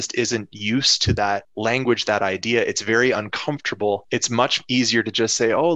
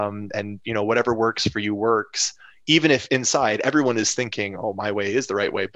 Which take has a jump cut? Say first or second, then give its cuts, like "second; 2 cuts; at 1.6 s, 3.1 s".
first; 2 cuts; at 1.5 s, 4.0 s